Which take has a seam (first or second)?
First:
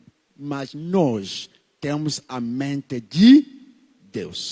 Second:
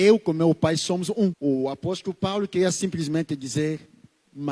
second